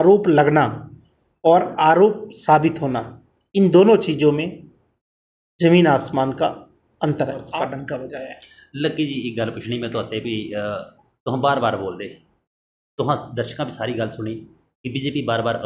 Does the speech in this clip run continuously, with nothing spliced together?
no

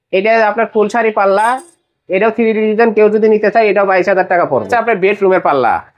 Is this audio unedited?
no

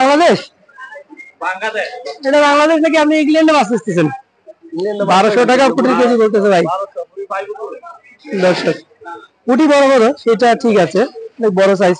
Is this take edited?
no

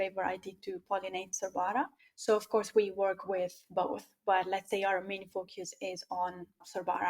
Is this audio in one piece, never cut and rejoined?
no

